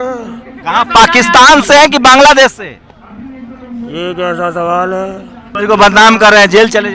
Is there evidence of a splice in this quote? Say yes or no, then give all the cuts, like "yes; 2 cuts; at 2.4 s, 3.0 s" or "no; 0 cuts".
yes; 1 cut; at 5.5 s